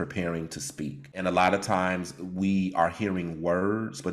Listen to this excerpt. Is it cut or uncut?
cut